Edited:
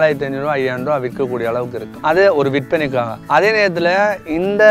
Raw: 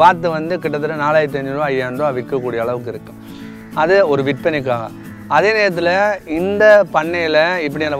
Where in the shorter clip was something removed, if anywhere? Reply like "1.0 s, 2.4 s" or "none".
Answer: 1.9 s, 3.2 s